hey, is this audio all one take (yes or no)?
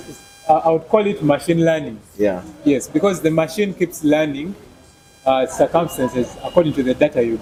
yes